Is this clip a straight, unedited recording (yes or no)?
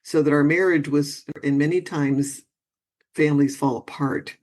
no